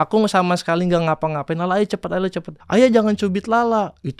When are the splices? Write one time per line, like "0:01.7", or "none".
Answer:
0:02.5